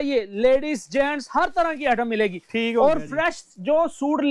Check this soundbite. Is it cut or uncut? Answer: uncut